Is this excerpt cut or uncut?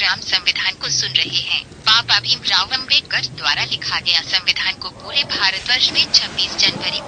cut